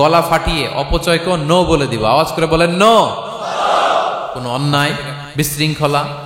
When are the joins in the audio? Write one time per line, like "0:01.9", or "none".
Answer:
0:04.4
0:05.2